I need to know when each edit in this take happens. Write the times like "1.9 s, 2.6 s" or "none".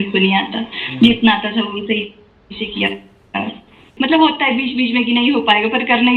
3.9 s